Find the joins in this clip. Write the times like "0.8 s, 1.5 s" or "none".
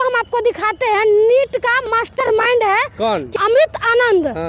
3.3 s